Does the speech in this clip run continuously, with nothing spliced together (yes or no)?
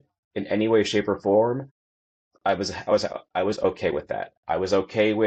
yes